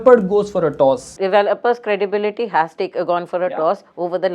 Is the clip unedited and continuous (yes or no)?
yes